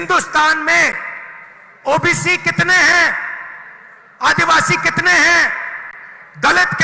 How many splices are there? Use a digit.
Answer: 0